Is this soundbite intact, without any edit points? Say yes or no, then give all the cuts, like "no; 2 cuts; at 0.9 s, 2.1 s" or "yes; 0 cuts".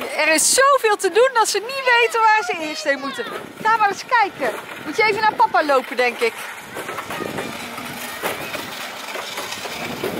yes; 0 cuts